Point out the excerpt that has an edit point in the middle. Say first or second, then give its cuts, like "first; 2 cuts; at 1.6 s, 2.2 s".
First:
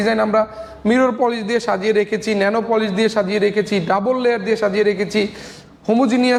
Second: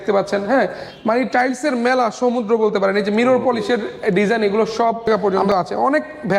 second; 1 cut; at 5.1 s